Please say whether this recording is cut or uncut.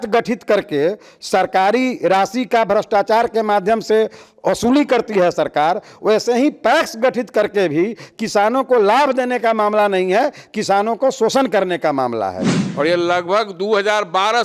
cut